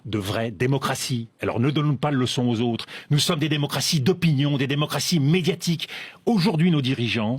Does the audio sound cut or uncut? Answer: uncut